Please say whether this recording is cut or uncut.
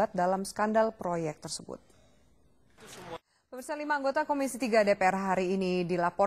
cut